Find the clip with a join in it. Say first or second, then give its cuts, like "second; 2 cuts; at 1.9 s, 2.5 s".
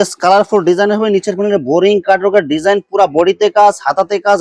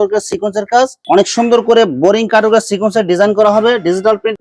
second; 1 cut; at 1.0 s